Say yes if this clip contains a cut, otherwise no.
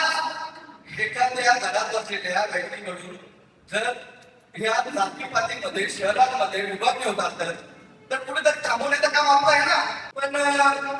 yes